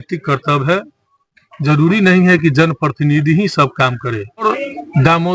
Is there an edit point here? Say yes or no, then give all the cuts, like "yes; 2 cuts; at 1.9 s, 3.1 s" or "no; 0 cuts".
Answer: yes; 1 cut; at 4.4 s